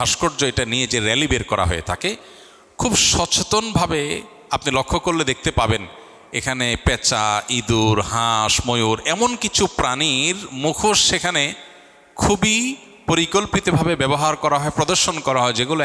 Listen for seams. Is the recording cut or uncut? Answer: uncut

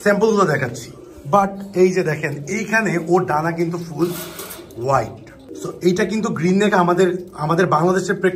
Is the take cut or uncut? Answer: uncut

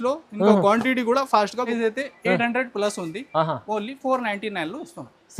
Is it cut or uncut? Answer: cut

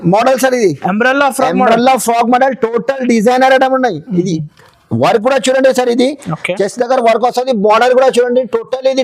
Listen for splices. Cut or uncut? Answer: uncut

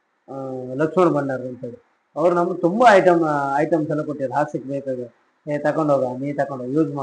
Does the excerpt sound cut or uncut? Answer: uncut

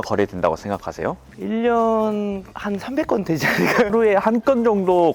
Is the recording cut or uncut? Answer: cut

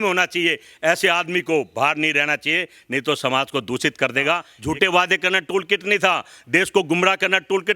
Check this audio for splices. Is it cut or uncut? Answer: cut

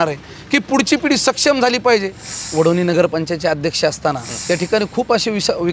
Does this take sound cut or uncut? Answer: cut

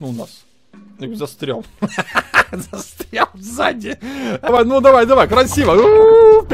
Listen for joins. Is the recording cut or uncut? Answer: cut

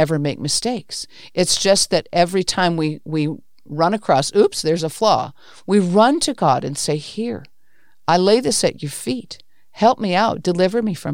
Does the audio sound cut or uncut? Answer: uncut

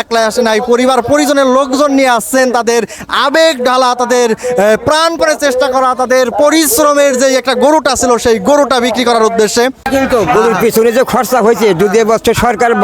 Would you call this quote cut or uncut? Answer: cut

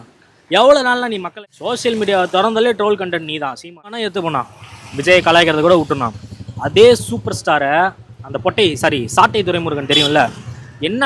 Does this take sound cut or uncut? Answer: cut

